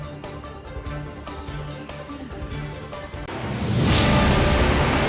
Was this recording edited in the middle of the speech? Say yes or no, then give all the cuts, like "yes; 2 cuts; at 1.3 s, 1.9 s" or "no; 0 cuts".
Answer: yes; 2 cuts; at 1.0 s, 3.3 s